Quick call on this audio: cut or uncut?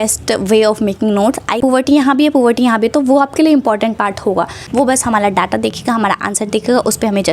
cut